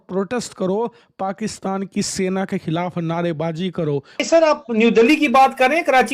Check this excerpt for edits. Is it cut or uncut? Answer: cut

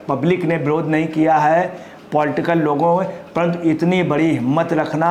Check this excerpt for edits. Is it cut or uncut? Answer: uncut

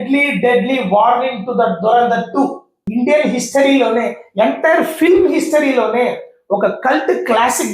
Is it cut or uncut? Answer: cut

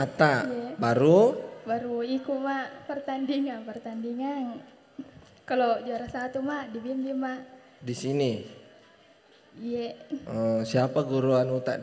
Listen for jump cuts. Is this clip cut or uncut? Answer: uncut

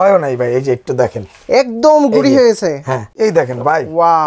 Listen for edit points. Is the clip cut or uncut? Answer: cut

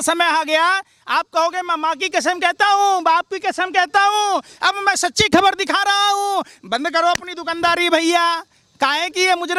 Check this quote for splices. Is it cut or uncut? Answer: uncut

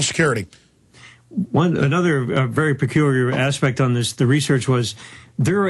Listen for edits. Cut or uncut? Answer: uncut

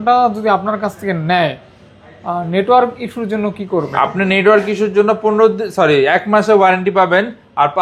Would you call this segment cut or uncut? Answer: uncut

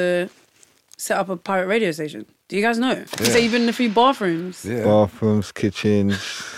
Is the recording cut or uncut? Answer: cut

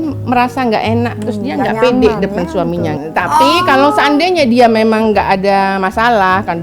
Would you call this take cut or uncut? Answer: cut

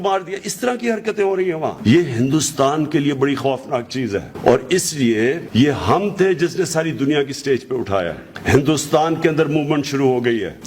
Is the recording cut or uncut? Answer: uncut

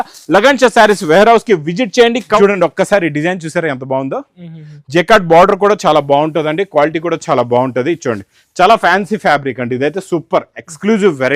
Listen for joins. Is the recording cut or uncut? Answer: cut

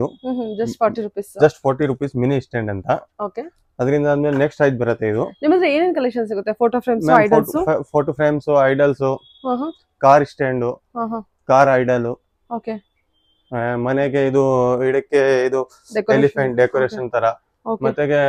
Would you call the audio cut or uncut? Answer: uncut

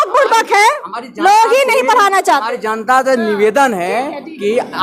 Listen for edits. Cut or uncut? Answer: uncut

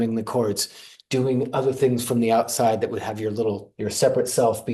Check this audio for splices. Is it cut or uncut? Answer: cut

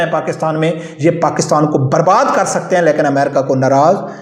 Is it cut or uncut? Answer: uncut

